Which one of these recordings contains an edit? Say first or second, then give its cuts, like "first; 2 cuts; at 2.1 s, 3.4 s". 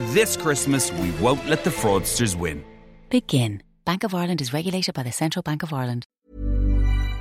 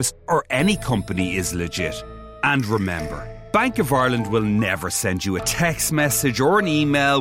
first; 1 cut; at 6.2 s